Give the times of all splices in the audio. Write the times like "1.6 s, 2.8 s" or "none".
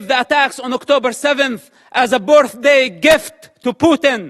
none

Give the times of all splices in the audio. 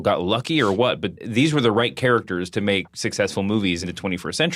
3.0 s, 3.8 s

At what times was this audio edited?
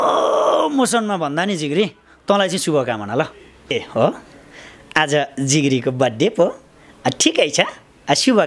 3.7 s

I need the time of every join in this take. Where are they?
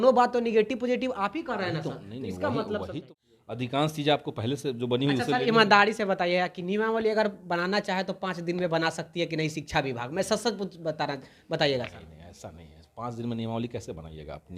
3.0 s

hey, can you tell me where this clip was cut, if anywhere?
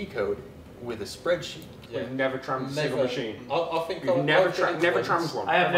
1.8 s

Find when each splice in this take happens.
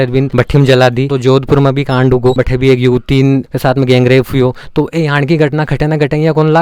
1.1 s, 2.3 s

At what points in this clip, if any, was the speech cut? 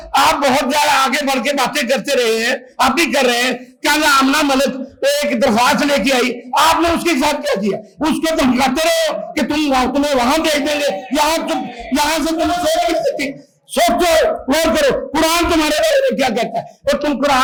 none

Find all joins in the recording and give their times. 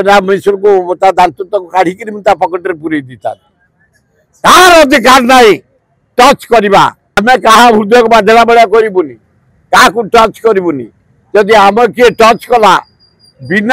7.1 s

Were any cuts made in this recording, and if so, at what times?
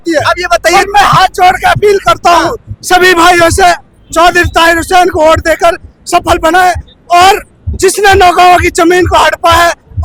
none

